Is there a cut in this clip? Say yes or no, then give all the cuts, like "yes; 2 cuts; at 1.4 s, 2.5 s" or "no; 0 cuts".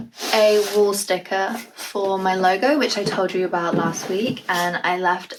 no; 0 cuts